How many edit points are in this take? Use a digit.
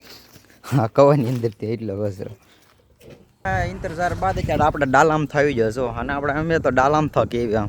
1